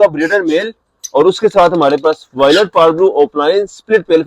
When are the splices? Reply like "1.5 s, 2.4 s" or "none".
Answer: none